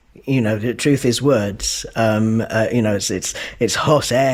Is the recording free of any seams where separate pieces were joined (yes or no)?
yes